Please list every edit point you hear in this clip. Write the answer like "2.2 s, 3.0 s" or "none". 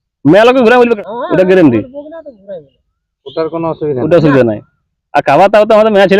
1.0 s